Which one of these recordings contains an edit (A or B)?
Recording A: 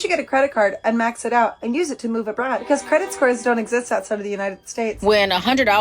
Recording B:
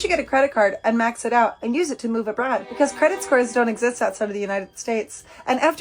A